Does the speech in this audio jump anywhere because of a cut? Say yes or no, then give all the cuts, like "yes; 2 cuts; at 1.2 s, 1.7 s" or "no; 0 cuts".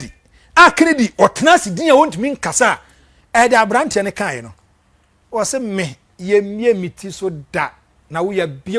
no; 0 cuts